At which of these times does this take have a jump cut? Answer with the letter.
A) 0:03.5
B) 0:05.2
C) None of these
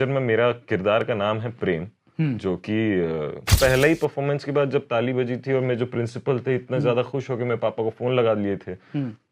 A